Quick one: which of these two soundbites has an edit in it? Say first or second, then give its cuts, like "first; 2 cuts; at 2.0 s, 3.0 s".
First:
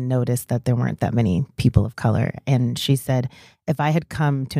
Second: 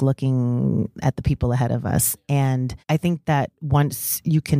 second; 1 cut; at 2.8 s